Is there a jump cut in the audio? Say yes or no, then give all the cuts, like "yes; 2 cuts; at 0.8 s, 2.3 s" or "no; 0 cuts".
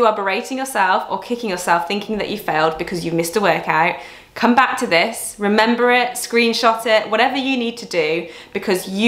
no; 0 cuts